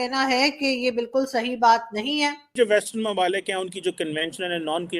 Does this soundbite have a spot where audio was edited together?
yes; 1 cut; at 2.5 s

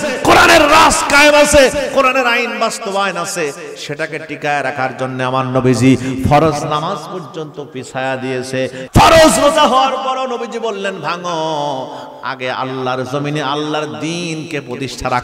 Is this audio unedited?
no; 1 cut; at 8.8 s

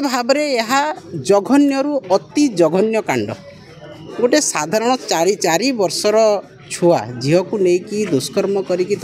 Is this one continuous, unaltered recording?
yes; 0 cuts

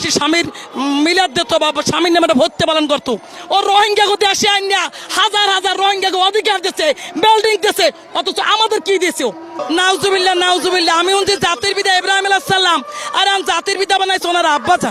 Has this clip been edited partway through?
yes; 2 cuts; at 3.3 s, 9.6 s

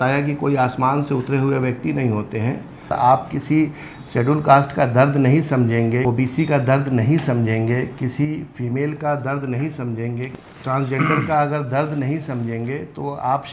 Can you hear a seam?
yes; 3 cuts; at 2.9 s, 6.0 s, 10.3 s

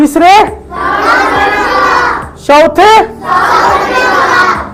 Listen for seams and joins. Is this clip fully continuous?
yes; 0 cuts

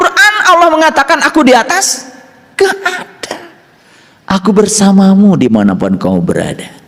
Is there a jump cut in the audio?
no; 0 cuts

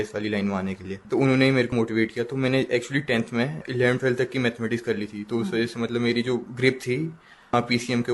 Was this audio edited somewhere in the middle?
yes; 4 cuts; at 0.9 s, 1.7 s, 3.6 s, 6.5 s

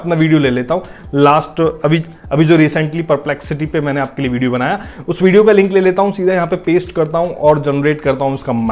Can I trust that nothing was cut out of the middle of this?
yes; 0 cuts

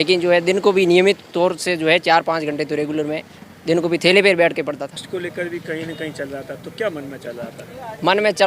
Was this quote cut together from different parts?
yes; 1 cut; at 5.0 s

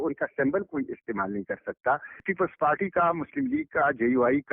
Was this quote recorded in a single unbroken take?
no; 1 cut; at 2.3 s

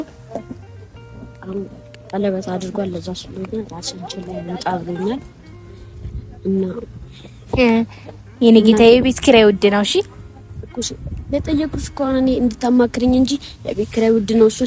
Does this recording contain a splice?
no; 0 cuts

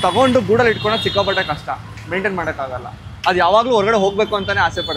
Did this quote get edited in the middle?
no; 0 cuts

